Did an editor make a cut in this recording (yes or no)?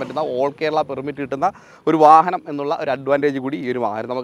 no